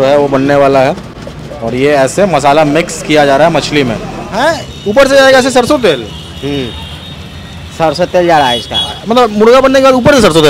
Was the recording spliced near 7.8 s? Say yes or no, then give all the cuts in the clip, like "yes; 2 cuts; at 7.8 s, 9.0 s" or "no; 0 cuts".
no; 1 cut; at 4.2 s